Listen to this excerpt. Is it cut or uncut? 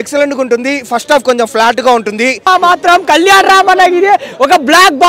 cut